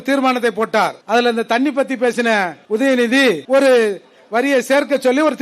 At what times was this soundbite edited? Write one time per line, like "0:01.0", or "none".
0:01.0
0:02.6
0:03.4